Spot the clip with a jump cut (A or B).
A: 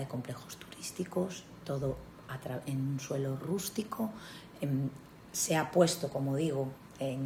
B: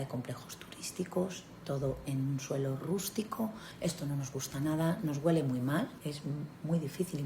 B